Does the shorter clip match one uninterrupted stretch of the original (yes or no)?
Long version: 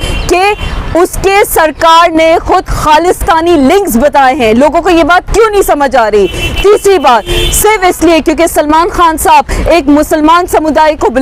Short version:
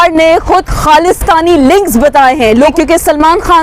no